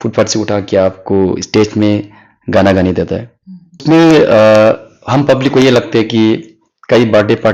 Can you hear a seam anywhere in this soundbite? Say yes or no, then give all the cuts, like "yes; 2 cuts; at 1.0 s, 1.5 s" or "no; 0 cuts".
no; 0 cuts